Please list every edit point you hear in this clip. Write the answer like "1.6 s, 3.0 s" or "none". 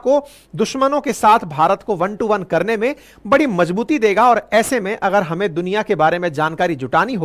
none